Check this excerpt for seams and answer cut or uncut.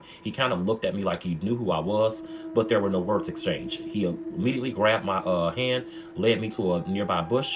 uncut